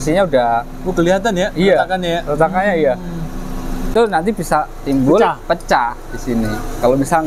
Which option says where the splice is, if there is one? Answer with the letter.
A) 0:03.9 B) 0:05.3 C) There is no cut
A